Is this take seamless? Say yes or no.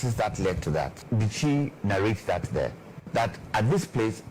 no